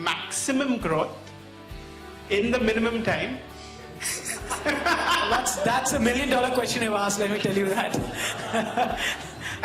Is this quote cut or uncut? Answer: uncut